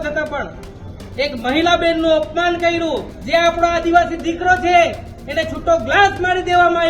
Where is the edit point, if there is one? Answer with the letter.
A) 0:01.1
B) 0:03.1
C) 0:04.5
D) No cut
B